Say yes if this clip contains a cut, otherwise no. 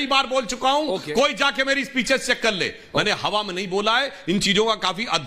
no